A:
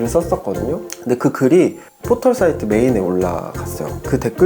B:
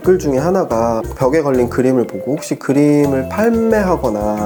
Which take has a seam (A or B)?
A